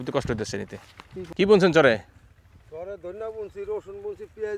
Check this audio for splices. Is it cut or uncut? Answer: cut